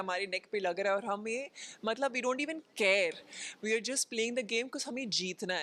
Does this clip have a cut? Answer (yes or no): no